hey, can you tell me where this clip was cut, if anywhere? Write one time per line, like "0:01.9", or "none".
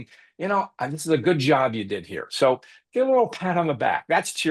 none